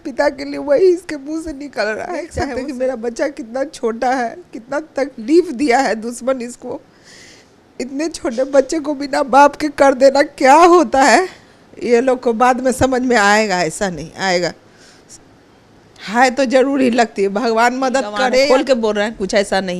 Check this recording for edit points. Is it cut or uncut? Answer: cut